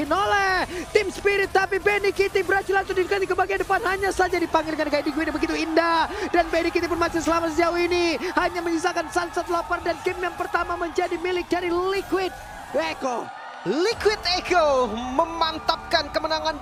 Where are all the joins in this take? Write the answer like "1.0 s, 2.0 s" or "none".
none